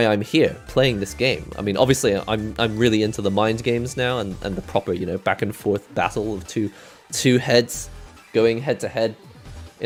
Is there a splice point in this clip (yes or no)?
no